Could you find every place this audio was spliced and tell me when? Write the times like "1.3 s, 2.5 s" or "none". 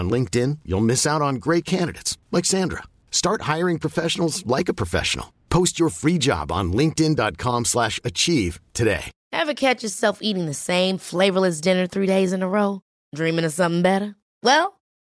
9.2 s